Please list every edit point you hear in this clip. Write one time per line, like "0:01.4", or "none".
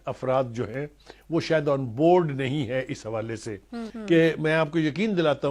0:03.9